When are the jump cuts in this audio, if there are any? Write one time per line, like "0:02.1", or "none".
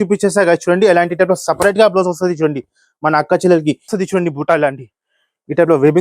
0:03.9